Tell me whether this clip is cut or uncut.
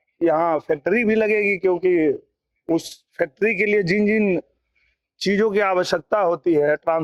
uncut